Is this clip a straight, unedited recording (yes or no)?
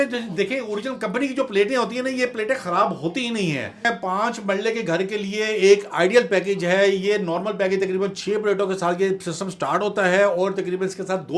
no